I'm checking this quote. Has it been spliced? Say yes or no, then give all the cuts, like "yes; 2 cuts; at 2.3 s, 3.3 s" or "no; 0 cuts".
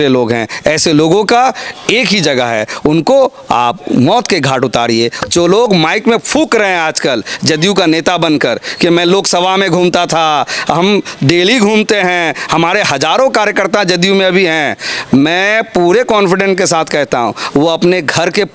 yes; 1 cut; at 5.2 s